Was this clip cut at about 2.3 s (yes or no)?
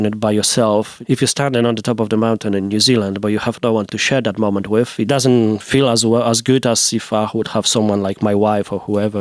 no